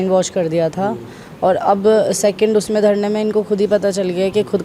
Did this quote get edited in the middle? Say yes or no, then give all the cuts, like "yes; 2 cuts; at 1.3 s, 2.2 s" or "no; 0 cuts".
no; 0 cuts